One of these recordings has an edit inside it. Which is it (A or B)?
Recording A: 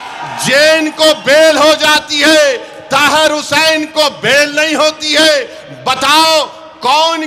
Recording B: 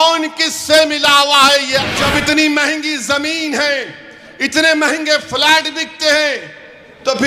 B